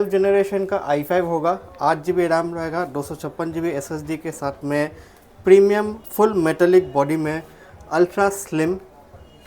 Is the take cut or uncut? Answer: uncut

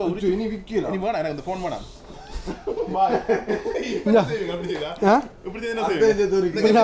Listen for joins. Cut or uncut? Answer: uncut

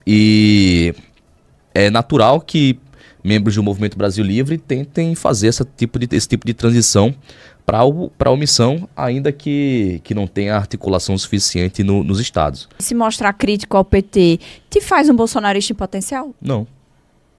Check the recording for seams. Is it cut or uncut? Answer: cut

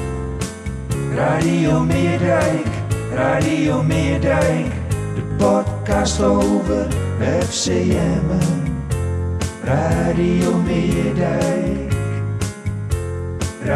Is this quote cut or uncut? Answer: uncut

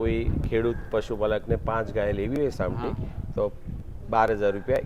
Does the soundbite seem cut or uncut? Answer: uncut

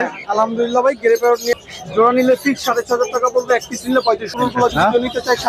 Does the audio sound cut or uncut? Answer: cut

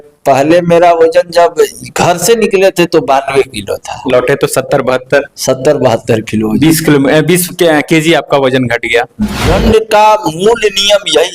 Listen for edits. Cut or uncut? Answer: cut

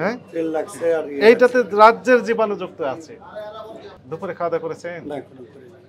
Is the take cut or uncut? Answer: cut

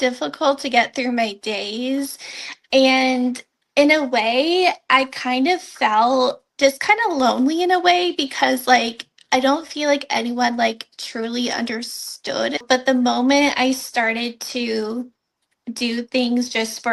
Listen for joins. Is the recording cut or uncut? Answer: cut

